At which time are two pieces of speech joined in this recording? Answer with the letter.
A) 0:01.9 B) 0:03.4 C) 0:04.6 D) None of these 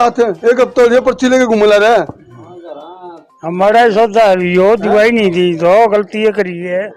D